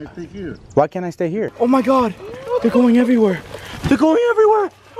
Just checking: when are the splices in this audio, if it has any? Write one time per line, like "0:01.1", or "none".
0:01.5